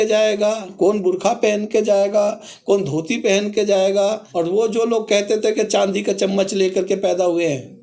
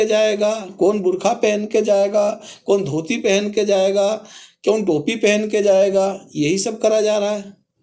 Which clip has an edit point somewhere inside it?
first; 1 cut; at 4.2 s

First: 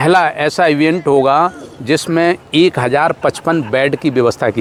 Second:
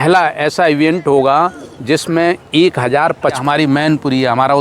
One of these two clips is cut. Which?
second; 1 cut; at 3.4 s

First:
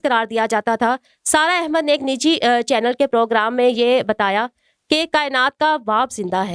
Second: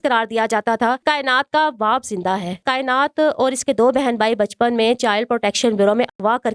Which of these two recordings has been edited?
second; 2 cuts; at 1.0 s, 2.6 s

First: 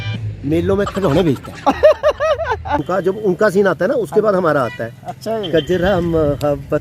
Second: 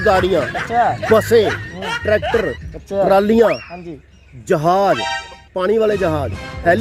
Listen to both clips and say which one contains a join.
first; 1 cut; at 2.9 s

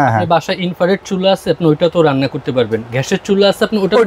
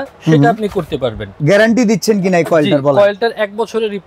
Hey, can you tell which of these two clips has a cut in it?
second; 1 cut; at 1.3 s

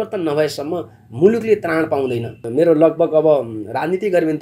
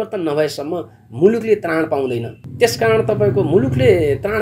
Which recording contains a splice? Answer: first; 1 cut; at 2.4 s

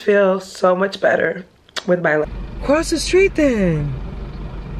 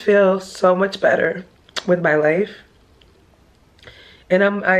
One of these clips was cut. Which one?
first; 1 cut; at 2.2 s

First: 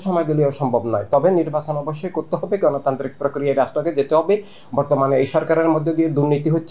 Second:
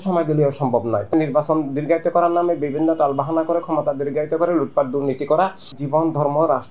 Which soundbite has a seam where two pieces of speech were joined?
second; 2 cuts; at 1.1 s, 5.7 s

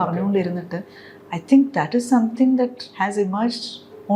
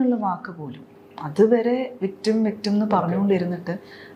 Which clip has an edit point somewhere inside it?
first; 1 cut; at 2.8 s

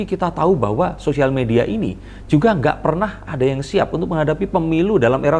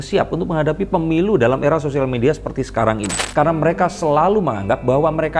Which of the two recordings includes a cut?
second; 1 cut; at 3.2 s

